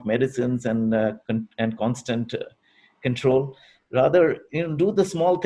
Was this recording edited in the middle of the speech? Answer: no; 0 cuts

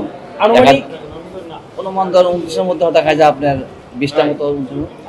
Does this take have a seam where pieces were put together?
no; 0 cuts

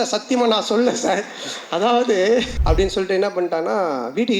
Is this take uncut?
no; 1 cut; at 2.5 s

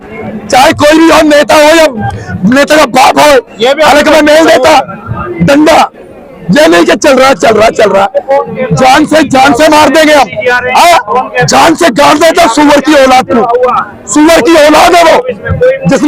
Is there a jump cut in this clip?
no; 0 cuts

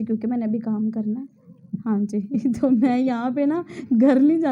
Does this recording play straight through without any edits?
yes; 0 cuts

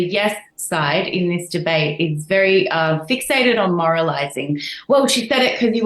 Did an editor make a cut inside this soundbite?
no; 0 cuts

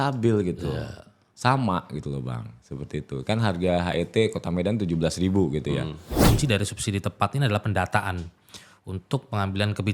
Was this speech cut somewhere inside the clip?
yes; 1 cut; at 6.2 s

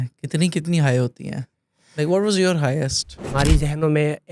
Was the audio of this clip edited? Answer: yes; 1 cut; at 3.2 s

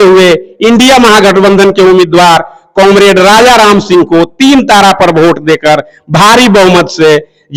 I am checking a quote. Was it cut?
no; 0 cuts

